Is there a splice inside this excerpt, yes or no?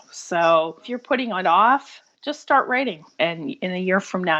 yes